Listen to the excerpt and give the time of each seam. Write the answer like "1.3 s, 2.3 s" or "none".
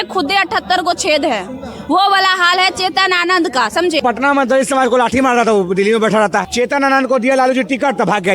4.0 s